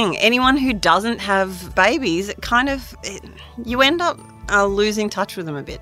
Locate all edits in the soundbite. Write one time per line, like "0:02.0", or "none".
none